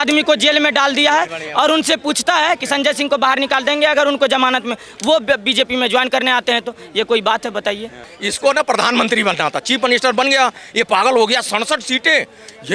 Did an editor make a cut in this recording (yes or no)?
yes